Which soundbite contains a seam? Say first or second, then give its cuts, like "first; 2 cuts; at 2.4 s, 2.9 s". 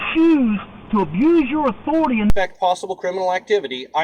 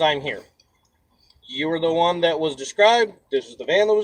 first; 1 cut; at 2.3 s